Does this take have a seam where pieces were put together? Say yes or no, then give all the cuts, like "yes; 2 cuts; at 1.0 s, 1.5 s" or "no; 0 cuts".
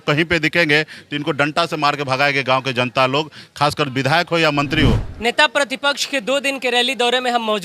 yes; 1 cut; at 5.1 s